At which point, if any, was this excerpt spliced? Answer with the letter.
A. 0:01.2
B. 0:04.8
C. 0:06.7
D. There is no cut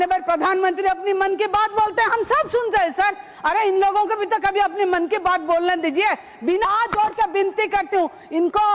C